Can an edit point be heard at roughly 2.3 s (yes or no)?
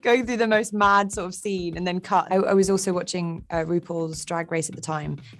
yes